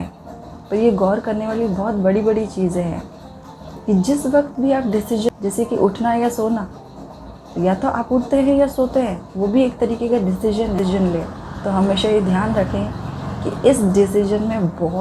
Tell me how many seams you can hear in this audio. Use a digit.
2